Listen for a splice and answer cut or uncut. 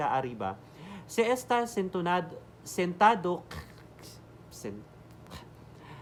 uncut